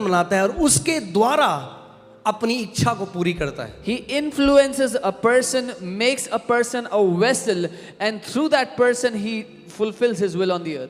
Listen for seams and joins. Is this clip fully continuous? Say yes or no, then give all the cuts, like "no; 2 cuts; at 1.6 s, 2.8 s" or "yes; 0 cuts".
yes; 0 cuts